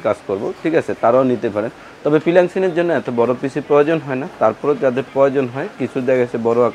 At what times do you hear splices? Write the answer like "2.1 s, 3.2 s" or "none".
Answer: none